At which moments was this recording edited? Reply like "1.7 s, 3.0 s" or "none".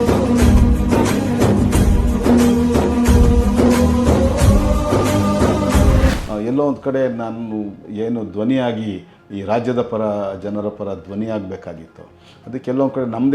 6.2 s